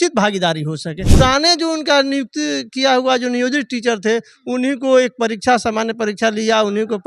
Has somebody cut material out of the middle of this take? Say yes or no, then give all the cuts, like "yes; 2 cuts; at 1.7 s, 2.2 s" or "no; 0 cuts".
yes; 1 cut; at 1.1 s